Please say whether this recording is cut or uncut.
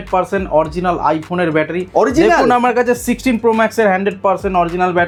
uncut